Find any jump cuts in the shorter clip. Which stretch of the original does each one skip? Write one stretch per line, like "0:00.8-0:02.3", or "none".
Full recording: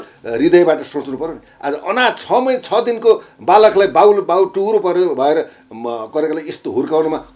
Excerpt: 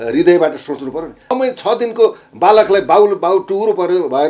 0:01.6-0:02.4